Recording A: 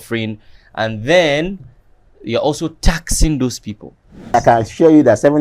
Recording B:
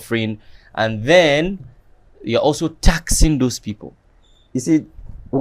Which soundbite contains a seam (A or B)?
A